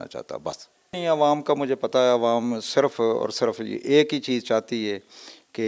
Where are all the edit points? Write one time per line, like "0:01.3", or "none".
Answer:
0:01.0